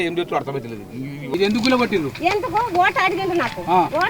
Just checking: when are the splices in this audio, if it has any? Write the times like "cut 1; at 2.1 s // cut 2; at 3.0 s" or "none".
cut 1; at 1.2 s